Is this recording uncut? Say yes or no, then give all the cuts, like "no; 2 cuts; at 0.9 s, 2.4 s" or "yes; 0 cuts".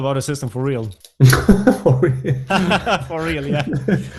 no; 1 cut; at 1.0 s